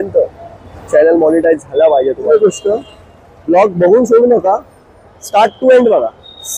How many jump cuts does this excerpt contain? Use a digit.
1